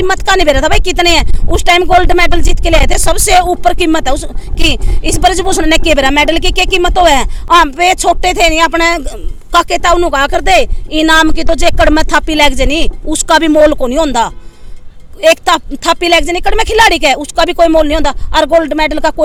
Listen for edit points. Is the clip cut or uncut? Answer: uncut